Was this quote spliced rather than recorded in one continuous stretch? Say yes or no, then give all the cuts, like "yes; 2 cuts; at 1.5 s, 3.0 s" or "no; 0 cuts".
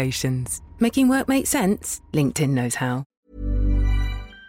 yes; 1 cut; at 3.2 s